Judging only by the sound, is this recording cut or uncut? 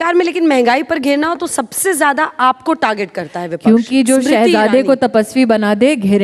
uncut